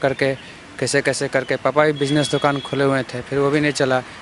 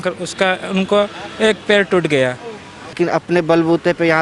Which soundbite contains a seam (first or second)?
second